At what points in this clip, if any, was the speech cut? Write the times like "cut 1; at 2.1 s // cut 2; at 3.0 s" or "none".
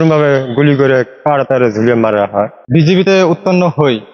cut 1; at 2.6 s